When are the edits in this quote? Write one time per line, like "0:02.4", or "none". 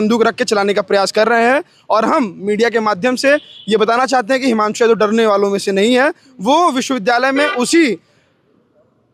none